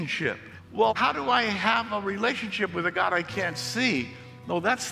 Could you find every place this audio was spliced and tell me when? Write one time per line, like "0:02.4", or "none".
0:00.9